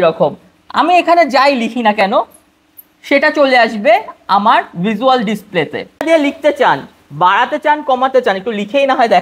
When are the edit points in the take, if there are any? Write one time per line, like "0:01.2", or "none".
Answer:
0:06.0